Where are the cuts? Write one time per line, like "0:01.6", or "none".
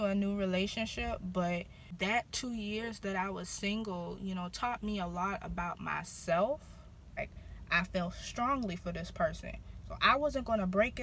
0:01.8
0:07.2